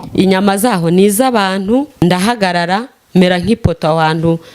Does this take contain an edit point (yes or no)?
yes